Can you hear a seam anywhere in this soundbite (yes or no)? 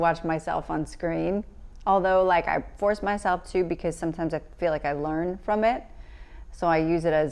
no